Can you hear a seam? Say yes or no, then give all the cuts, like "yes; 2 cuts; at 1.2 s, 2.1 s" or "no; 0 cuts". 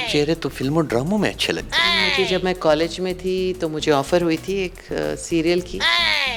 no; 0 cuts